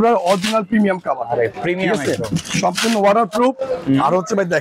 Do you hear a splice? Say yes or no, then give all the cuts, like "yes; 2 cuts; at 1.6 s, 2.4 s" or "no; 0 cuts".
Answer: no; 0 cuts